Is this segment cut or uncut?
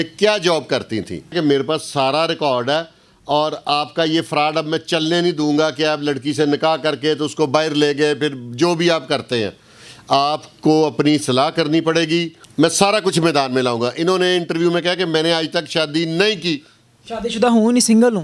cut